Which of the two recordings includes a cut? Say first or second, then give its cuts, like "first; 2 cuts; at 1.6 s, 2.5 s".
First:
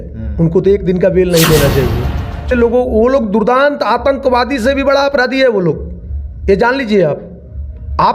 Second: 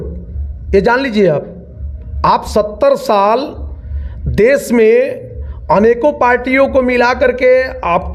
first; 1 cut; at 2.5 s